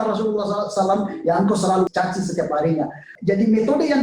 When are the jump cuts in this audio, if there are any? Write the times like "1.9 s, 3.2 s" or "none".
1.9 s, 3.0 s